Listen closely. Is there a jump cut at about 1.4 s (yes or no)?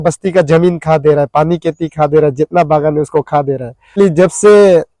no